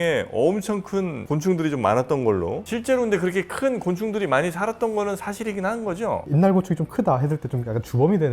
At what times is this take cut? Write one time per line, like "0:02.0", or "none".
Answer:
0:02.6
0:06.2